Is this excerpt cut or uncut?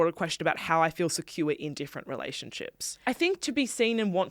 cut